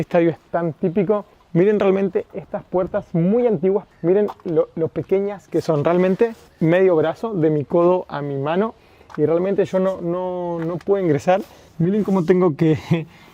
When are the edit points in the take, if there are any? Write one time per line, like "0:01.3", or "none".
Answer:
0:01.4
0:03.9
0:06.5
0:11.6